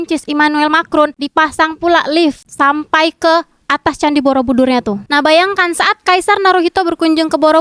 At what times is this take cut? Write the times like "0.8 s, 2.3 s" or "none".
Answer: 5.0 s